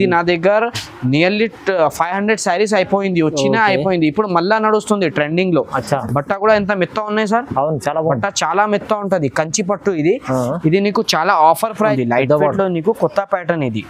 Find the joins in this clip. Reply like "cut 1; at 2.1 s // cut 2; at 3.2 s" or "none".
cut 1; at 11.9 s